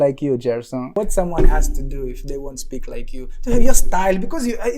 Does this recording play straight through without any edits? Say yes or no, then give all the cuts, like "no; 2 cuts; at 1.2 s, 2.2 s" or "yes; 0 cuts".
no; 1 cut; at 0.9 s